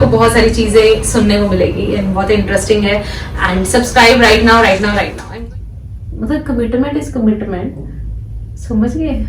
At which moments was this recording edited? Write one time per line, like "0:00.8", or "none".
0:05.2